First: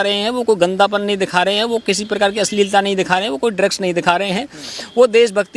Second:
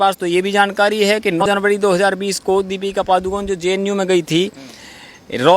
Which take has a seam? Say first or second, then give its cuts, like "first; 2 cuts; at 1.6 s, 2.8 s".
second; 1 cut; at 1.4 s